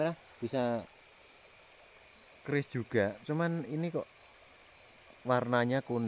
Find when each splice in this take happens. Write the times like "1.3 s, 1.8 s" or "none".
0.9 s